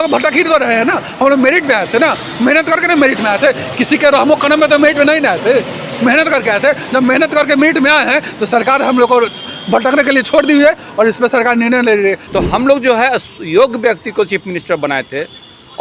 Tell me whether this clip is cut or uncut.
cut